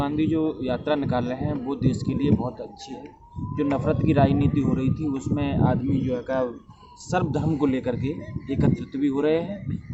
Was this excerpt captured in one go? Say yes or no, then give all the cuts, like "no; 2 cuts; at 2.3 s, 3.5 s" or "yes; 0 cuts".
yes; 0 cuts